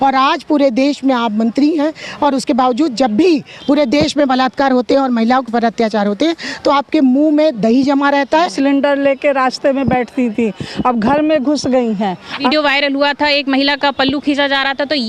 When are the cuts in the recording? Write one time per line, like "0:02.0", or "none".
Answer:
0:08.5
0:12.4